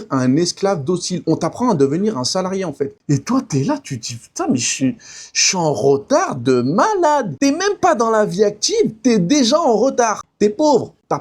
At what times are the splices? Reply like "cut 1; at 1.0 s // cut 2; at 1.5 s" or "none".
cut 1; at 3.0 s // cut 2; at 7.3 s // cut 3; at 10.2 s